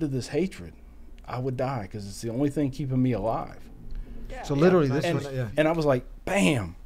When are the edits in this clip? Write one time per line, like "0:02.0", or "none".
0:05.0